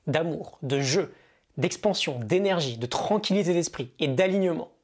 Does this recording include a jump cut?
no; 0 cuts

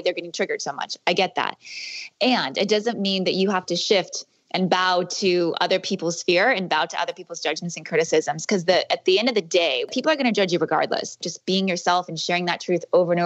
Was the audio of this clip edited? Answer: yes; 2 cuts; at 9.9 s, 11.1 s

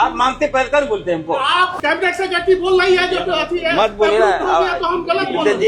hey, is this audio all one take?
no; 1 cut; at 1.8 s

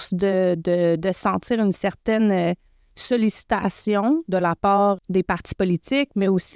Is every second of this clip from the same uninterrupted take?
no; 1 cut; at 5.0 s

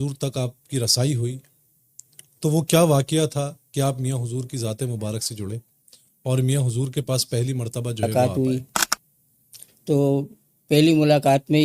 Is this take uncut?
no; 1 cut; at 8.0 s

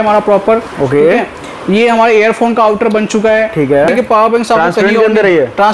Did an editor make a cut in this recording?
yes; 1 cut; at 3.9 s

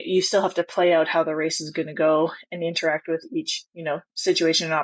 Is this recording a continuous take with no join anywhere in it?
yes; 0 cuts

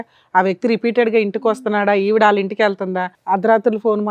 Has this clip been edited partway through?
yes; 1 cut; at 3.1 s

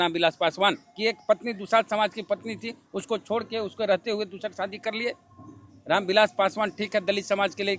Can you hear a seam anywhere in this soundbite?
no; 0 cuts

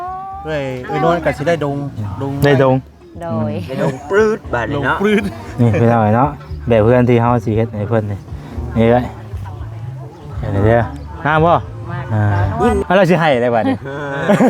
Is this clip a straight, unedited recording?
no; 1 cut; at 11.0 s

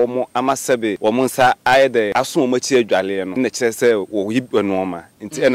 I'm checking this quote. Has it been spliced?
yes; 3 cuts; at 1.0 s, 2.1 s, 3.3 s

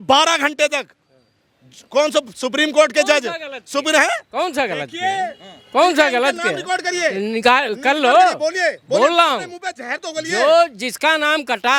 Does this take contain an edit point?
no; 0 cuts

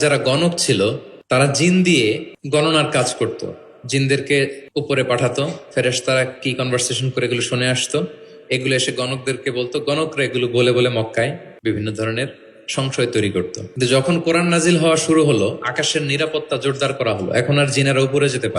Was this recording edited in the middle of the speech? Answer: yes; 5 cuts; at 1.1 s, 2.3 s, 4.6 s, 11.5 s, 13.6 s

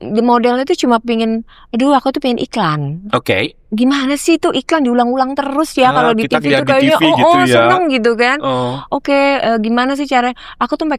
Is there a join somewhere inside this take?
no; 0 cuts

